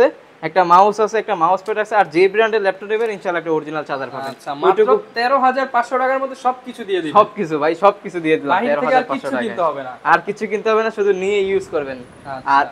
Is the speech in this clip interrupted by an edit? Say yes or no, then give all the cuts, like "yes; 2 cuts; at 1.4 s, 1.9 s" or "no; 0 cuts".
no; 0 cuts